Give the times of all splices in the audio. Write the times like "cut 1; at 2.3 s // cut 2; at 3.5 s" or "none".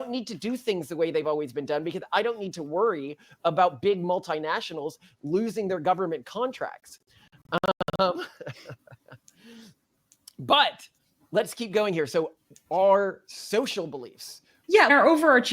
none